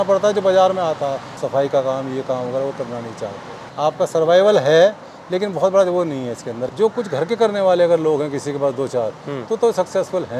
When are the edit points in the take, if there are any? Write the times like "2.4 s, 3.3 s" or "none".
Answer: 1.3 s, 3.6 s, 6.6 s